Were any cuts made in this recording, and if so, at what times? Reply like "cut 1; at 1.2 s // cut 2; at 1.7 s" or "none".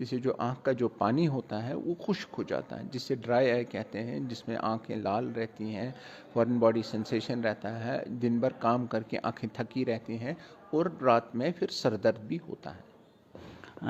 none